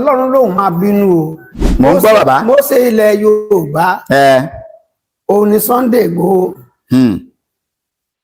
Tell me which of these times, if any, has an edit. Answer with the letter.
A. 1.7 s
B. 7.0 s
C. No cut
A